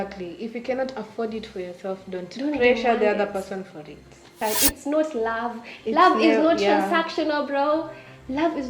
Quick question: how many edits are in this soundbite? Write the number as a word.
one